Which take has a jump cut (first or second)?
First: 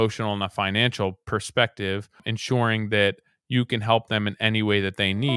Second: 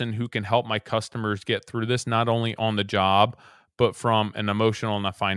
first